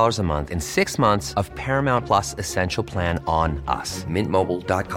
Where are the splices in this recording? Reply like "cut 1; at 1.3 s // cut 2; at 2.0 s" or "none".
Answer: none